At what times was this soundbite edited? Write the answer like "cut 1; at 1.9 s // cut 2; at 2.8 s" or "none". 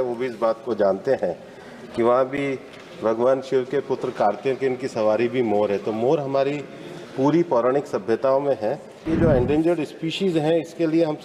cut 1; at 9.0 s